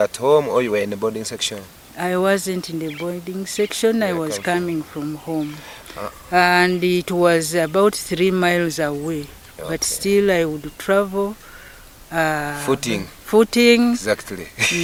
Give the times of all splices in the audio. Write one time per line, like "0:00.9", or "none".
none